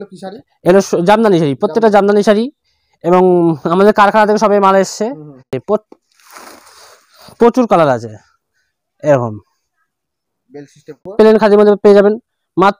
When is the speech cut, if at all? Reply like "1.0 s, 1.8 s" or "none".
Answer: 5.6 s, 11.1 s